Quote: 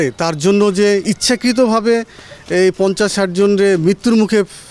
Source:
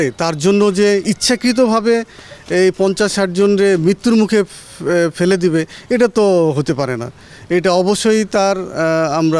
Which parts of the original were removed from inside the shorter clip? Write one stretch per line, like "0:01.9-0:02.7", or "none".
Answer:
none